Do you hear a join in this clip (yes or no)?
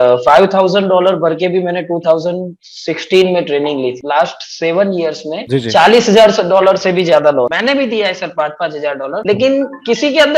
yes